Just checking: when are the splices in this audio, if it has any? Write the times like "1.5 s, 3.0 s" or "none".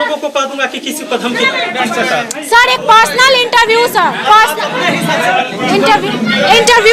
1.7 s